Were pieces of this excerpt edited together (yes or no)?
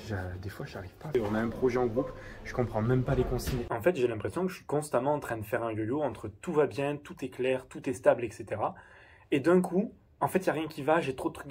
yes